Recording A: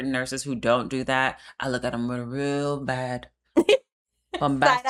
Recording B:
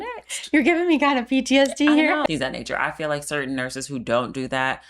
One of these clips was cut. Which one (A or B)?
B